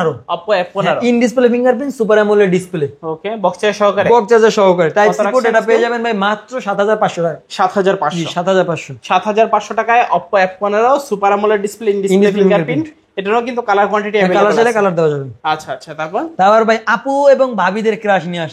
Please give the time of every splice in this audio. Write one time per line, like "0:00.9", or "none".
none